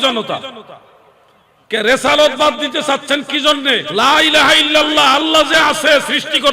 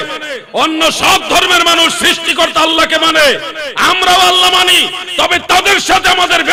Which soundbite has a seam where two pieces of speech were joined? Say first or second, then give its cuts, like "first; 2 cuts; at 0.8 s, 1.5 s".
first; 1 cut; at 3.9 s